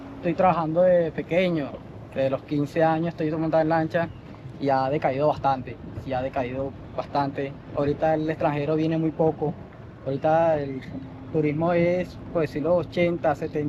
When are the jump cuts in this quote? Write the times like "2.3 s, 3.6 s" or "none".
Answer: none